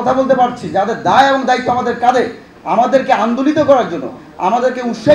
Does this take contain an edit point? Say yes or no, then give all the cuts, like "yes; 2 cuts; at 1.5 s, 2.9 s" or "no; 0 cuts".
yes; 1 cut; at 2.5 s